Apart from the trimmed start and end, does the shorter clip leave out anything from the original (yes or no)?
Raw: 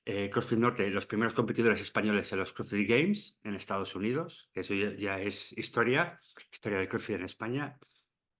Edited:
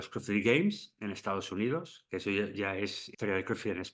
yes